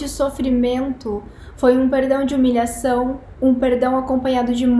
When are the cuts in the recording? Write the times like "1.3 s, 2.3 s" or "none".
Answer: none